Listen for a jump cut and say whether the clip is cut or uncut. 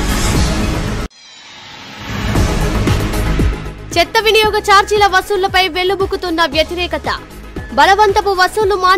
uncut